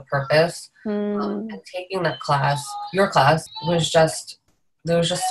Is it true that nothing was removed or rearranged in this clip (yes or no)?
no